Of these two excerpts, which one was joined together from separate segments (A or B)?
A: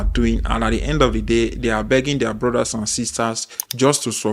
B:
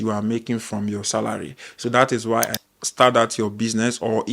B